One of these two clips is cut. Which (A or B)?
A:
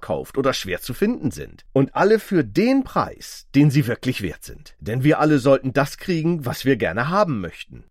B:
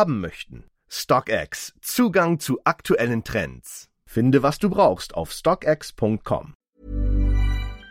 B